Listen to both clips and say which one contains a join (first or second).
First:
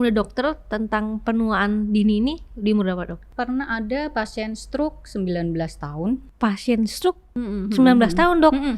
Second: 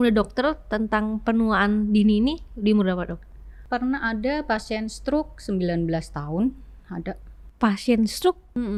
first